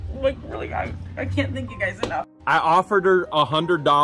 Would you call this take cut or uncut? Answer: cut